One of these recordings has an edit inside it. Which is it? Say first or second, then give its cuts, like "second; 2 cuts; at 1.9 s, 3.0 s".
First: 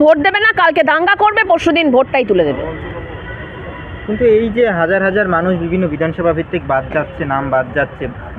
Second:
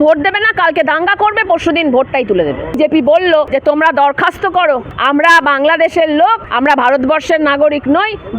second; 4 cuts; at 2.8 s, 3.5 s, 4.9 s, 6.4 s